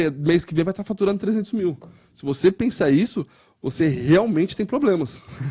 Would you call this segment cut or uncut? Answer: uncut